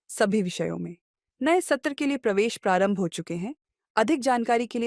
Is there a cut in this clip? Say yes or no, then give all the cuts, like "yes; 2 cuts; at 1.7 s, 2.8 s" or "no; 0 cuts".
no; 0 cuts